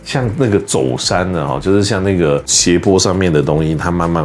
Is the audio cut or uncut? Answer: uncut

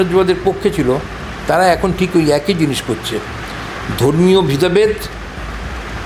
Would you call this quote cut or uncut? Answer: uncut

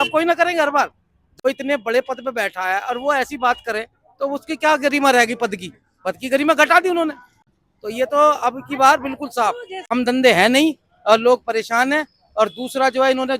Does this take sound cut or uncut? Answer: cut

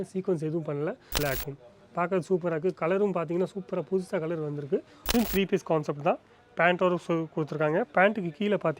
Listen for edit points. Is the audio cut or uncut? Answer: cut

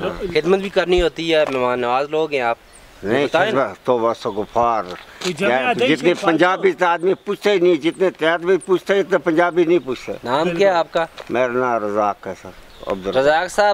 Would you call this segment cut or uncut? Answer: uncut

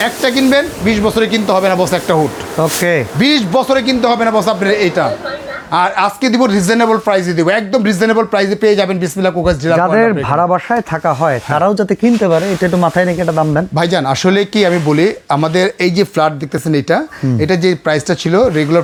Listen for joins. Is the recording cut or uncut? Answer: uncut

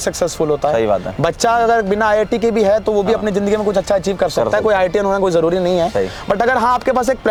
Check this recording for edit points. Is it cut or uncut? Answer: uncut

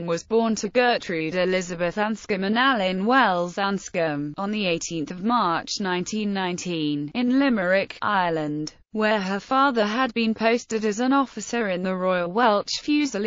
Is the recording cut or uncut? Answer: uncut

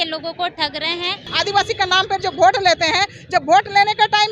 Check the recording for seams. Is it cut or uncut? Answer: cut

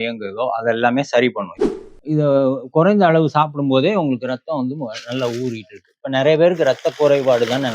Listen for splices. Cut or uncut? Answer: cut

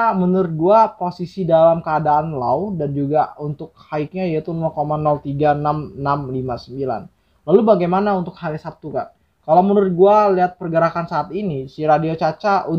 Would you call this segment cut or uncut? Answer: uncut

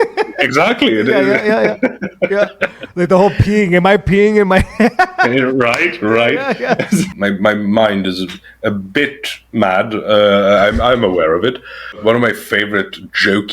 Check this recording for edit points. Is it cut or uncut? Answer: cut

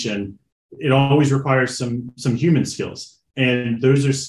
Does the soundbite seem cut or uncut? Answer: uncut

